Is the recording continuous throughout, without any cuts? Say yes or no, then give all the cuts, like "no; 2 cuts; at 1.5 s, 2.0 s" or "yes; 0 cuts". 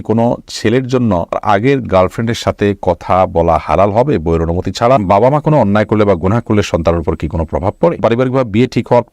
no; 3 cuts; at 1.4 s, 5.0 s, 8.0 s